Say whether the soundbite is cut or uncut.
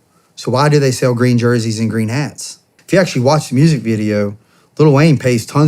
cut